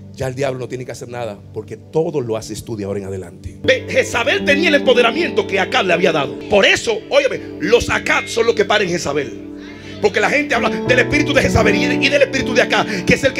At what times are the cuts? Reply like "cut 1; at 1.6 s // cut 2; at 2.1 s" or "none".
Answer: cut 1; at 3.6 s // cut 2; at 6.4 s